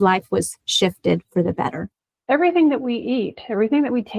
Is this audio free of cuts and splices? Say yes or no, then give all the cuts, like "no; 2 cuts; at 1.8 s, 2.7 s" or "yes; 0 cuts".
no; 1 cut; at 1.9 s